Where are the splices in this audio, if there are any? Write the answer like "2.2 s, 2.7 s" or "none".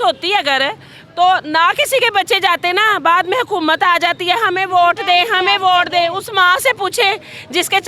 none